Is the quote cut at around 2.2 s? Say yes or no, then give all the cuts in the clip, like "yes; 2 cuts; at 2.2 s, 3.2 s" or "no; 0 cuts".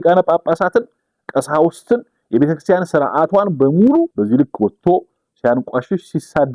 no; 1 cut; at 4.1 s